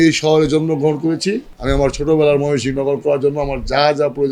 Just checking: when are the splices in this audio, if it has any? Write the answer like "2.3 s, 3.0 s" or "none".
1.5 s

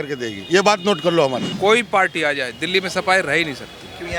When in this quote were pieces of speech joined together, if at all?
1.5 s

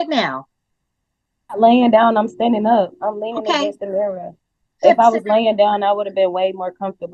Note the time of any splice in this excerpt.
none

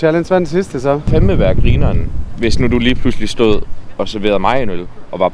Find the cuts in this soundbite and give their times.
none

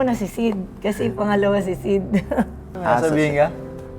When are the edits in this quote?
2.6 s

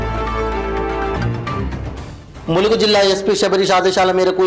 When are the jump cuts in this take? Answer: 1.1 s

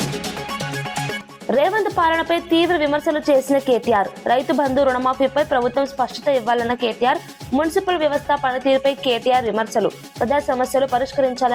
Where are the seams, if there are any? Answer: 1.3 s

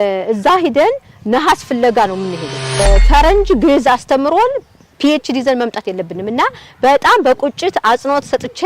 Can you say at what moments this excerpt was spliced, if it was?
2.8 s

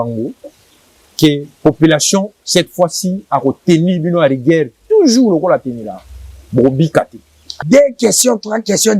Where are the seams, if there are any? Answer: 7.6 s

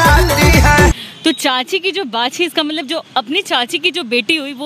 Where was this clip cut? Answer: 1.0 s

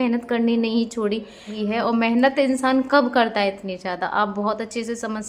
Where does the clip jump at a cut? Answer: 1.5 s

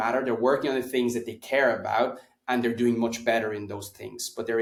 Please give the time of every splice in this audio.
none

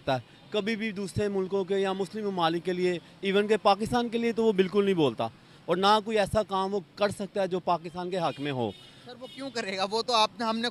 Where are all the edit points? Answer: none

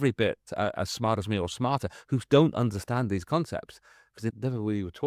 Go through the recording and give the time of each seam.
none

